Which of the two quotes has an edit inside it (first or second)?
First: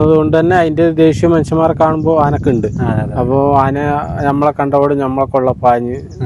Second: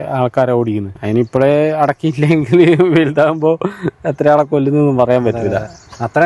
second